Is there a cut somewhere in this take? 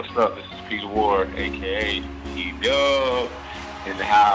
no; 0 cuts

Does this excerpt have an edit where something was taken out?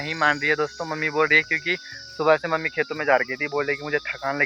no; 0 cuts

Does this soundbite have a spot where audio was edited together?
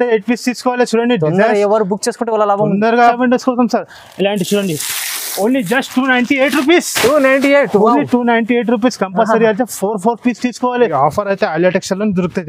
yes; 2 cuts; at 3.1 s, 10.9 s

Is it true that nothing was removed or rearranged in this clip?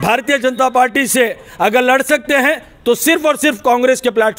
yes; 0 cuts

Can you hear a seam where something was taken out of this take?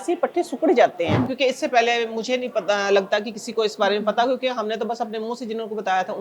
yes; 1 cut; at 1.3 s

